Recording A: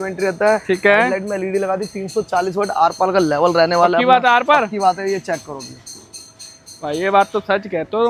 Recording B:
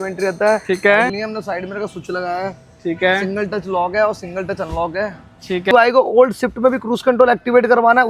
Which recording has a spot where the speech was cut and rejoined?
B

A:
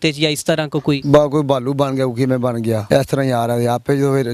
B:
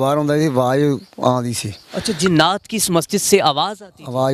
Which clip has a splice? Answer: A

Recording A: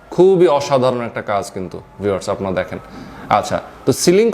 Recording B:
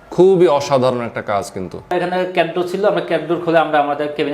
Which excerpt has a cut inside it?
B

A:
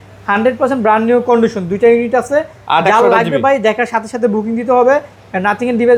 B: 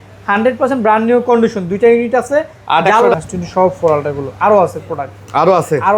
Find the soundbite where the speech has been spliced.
B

